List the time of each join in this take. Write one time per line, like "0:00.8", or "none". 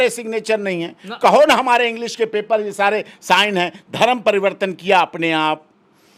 none